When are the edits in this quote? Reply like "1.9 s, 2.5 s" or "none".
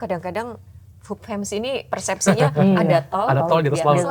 none